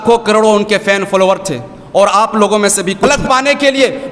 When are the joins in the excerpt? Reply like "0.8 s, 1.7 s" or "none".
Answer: 3.1 s